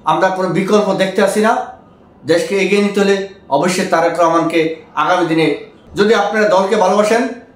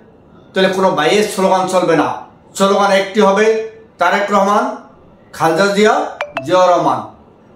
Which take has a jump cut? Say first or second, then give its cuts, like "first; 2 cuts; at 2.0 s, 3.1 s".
first; 1 cut; at 5.7 s